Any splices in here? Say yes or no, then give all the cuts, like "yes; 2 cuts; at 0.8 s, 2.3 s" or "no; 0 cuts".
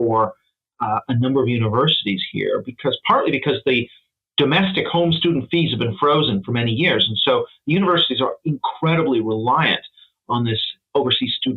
no; 0 cuts